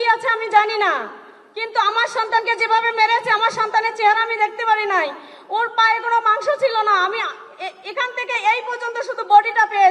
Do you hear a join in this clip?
no; 0 cuts

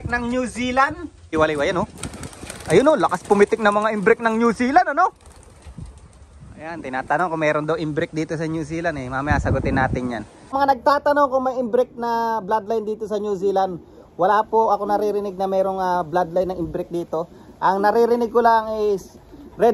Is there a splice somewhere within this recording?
yes; 2 cuts; at 1.3 s, 10.5 s

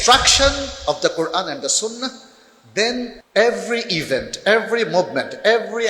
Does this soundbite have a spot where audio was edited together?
yes; 1 cut; at 3.2 s

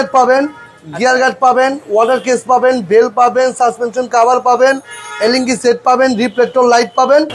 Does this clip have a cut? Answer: no; 0 cuts

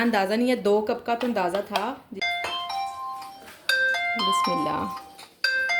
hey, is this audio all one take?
no; 1 cut; at 2.1 s

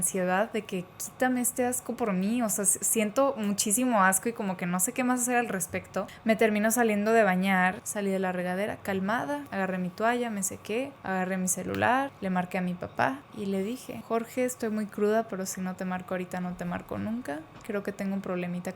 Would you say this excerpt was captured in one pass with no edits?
no; 6 cuts; at 6.1 s, 7.9 s, 9.5 s, 11.0 s, 12.1 s, 13.9 s

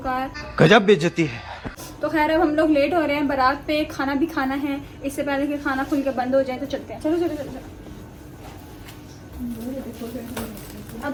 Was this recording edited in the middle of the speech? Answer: no; 0 cuts

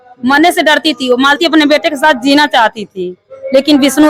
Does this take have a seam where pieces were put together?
no; 0 cuts

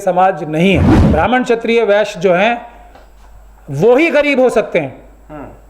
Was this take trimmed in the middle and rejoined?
yes; 1 cut; at 1.0 s

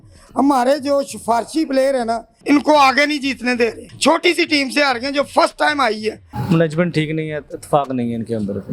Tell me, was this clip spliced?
yes; 2 cuts; at 2.3 s, 6.3 s

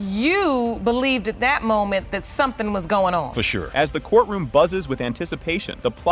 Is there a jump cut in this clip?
no; 0 cuts

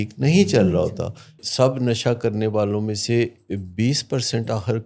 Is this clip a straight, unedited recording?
no; 1 cut; at 1.4 s

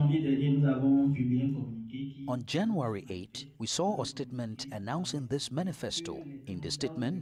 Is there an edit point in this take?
no; 0 cuts

